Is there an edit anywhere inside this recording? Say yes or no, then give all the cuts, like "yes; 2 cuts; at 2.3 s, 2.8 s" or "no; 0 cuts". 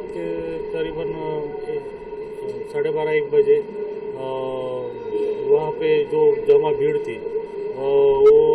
no; 0 cuts